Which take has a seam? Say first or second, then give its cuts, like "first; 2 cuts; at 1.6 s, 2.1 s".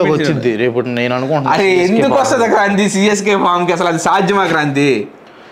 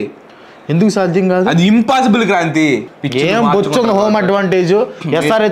second; 1 cut; at 3.0 s